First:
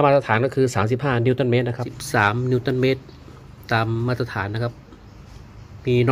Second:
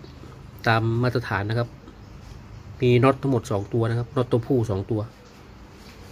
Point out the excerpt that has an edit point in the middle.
first; 1 cut; at 1.9 s

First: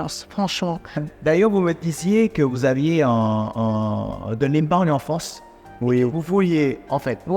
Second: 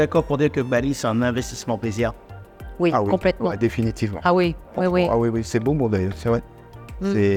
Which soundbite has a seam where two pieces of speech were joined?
first; 1 cut; at 1.1 s

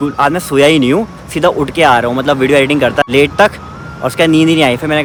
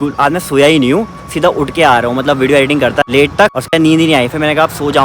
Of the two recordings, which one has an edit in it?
second; 1 cut; at 3.6 s

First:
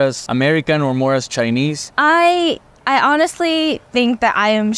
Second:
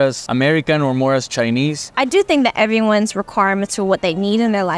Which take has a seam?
second; 1 cut; at 1.9 s

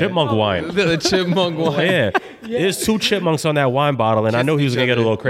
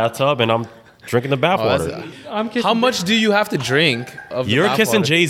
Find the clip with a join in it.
second; 1 cut; at 1.8 s

